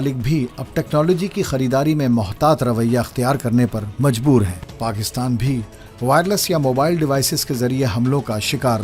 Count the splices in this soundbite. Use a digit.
1